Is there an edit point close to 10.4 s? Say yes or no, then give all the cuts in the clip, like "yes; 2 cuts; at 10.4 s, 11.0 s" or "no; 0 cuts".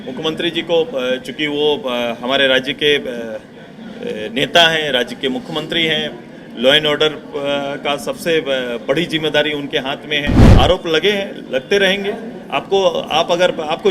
yes; 1 cut; at 10.4 s